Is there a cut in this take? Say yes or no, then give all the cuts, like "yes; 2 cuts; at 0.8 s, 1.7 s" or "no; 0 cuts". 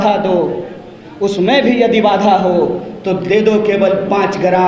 no; 0 cuts